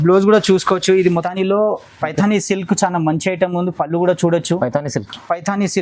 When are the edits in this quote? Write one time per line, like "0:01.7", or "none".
0:01.2